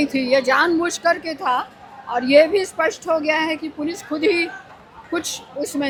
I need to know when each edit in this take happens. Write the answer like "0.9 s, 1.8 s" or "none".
none